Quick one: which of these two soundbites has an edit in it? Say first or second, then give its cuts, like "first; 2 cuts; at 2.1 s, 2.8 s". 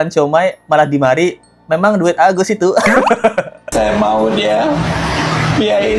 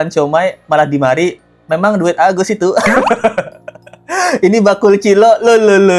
first; 1 cut; at 3.6 s